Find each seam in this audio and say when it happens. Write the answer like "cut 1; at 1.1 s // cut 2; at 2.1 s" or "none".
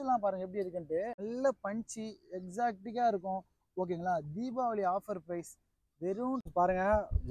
cut 1; at 1.2 s // cut 2; at 6.5 s